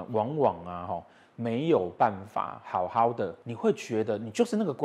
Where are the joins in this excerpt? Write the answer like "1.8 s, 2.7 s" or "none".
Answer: 3.3 s

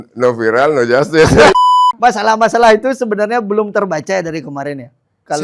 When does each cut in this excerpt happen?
1.5 s

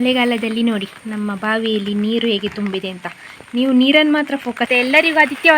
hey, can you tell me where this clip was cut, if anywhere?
4.7 s

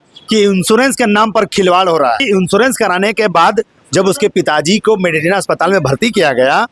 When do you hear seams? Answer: 2.2 s

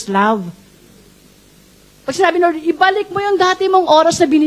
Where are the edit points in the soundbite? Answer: none

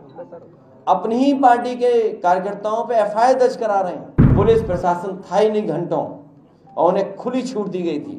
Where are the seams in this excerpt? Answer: 4.3 s

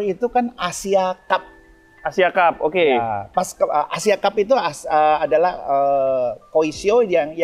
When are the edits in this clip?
none

